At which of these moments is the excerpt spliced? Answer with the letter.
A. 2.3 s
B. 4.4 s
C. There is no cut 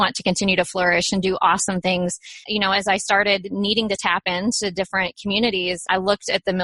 A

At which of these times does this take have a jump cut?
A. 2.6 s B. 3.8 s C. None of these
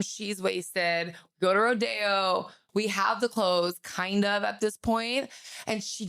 A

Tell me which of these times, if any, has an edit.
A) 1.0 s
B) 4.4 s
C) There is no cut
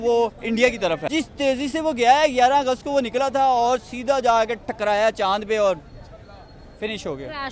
A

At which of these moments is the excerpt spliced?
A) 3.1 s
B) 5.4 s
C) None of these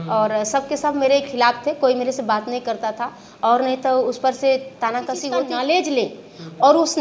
B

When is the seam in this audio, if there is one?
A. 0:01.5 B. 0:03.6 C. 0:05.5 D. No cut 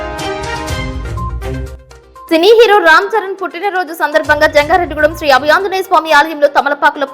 A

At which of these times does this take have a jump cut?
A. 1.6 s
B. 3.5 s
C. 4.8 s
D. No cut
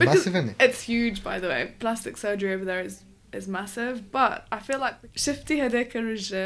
C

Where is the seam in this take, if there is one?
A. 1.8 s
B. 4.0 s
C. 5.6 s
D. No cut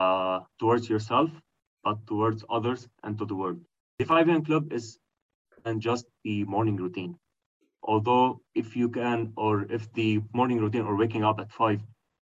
B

